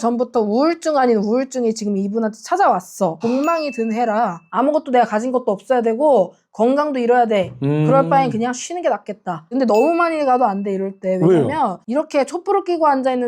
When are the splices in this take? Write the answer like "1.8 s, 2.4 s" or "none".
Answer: 3.2 s, 9.5 s